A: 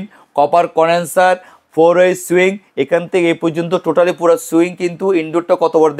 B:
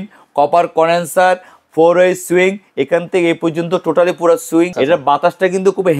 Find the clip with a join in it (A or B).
B